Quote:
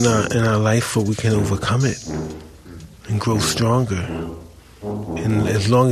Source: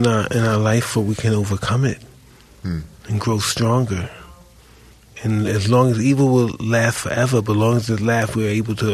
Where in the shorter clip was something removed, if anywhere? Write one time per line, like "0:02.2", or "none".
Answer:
none